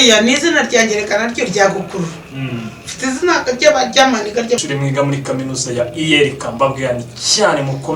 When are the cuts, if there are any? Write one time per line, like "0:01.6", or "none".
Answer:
0:04.6